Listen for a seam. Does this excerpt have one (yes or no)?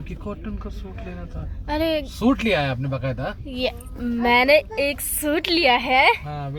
no